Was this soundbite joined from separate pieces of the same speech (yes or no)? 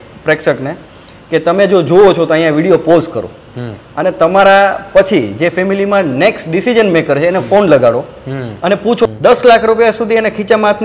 yes